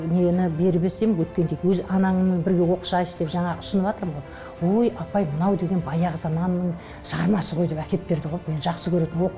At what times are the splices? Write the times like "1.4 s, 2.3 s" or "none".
1.5 s